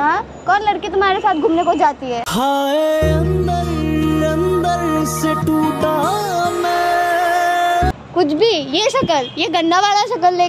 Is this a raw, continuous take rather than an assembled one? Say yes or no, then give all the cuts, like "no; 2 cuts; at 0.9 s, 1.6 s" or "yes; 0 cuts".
yes; 0 cuts